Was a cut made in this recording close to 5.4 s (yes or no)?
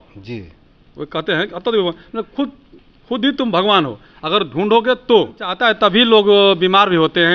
yes